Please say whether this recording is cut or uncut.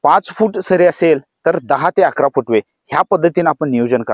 uncut